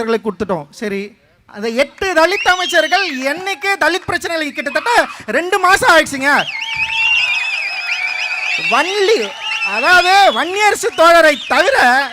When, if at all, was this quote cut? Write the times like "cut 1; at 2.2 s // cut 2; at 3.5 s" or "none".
none